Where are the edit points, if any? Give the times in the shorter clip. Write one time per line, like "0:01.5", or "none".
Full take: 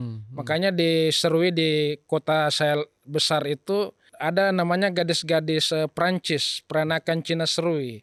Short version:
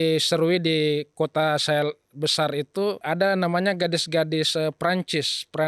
0:03.0